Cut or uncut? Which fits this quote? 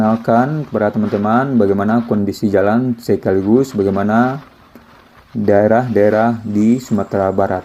uncut